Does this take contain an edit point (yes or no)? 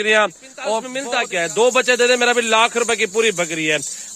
yes